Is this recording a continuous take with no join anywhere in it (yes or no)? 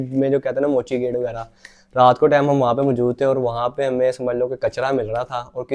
yes